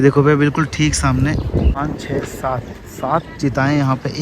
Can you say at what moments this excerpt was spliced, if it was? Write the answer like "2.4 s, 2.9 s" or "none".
1.8 s